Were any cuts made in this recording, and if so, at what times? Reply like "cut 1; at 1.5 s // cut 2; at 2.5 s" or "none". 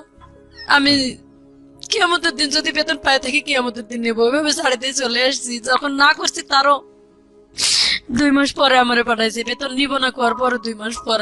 none